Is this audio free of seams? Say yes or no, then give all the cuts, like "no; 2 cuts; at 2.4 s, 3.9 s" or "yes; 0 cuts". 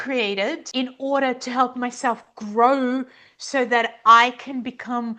yes; 0 cuts